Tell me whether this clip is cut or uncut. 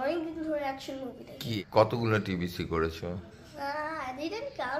cut